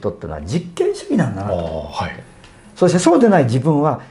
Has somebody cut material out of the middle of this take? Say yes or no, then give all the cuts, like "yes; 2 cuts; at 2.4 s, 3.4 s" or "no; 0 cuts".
no; 0 cuts